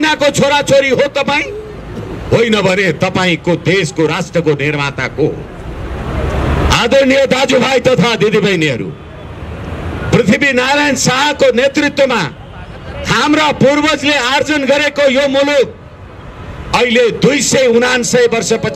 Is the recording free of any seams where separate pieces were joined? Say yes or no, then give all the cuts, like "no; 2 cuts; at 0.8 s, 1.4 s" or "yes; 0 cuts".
yes; 0 cuts